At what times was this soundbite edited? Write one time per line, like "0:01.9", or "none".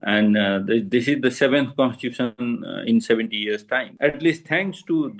0:03.9